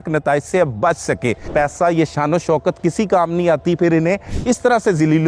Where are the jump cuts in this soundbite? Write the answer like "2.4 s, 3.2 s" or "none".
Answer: 1.5 s